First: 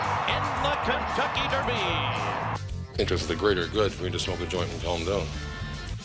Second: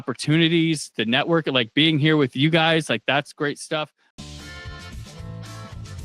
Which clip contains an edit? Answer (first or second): second